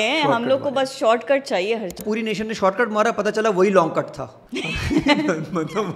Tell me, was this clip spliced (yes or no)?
yes